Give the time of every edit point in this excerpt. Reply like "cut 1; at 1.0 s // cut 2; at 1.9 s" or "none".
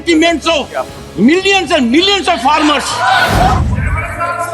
cut 1; at 3.5 s